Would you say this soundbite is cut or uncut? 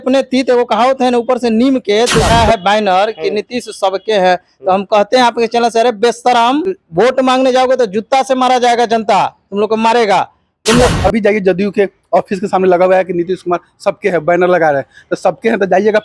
cut